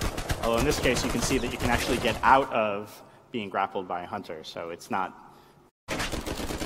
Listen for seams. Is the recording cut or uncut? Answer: uncut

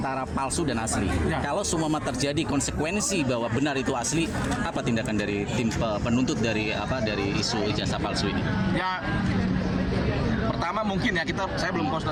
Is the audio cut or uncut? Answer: uncut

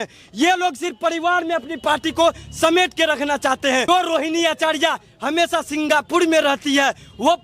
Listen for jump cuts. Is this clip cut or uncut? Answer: cut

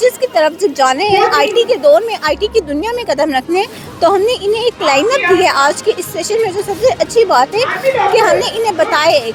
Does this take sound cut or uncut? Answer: uncut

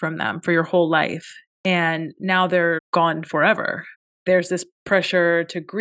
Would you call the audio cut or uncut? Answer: uncut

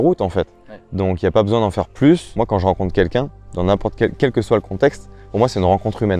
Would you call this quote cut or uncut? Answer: cut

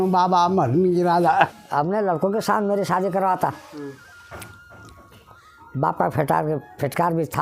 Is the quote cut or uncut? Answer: cut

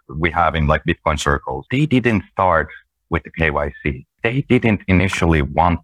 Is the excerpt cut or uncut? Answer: cut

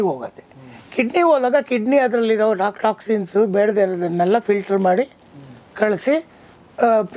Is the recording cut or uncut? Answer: uncut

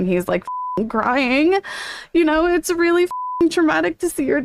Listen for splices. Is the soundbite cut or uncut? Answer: cut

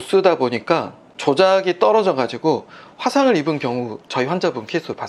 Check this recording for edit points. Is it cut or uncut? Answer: uncut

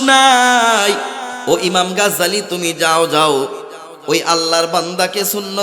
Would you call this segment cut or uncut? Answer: cut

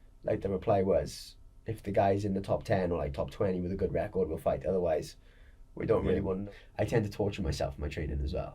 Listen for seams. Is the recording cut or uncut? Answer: cut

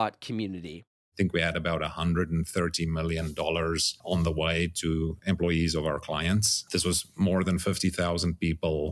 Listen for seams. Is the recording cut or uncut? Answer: cut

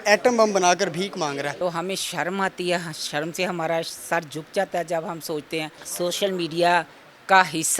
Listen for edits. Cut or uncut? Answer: cut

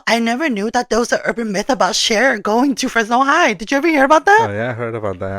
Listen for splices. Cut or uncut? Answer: uncut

